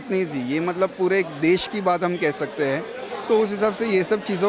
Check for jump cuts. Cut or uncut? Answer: uncut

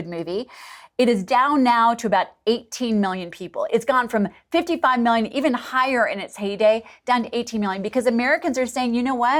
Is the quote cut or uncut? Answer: uncut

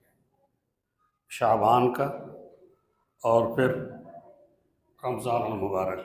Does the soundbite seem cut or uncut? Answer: uncut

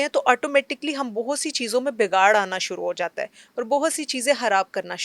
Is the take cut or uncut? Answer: uncut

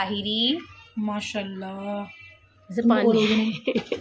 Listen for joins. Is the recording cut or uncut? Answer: uncut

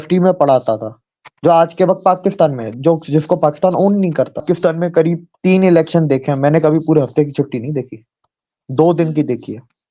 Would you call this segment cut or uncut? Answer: cut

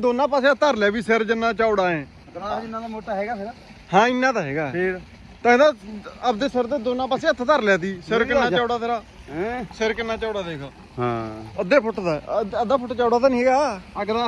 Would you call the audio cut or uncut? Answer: uncut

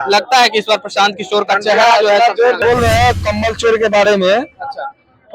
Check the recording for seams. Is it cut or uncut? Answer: cut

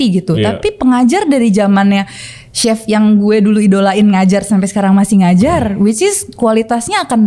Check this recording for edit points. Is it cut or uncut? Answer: uncut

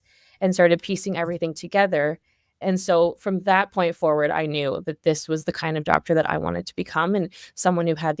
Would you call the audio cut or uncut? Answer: cut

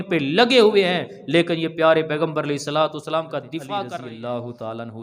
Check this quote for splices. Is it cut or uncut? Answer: cut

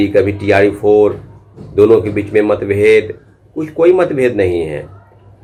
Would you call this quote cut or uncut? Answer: uncut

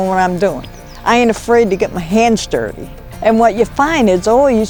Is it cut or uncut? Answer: uncut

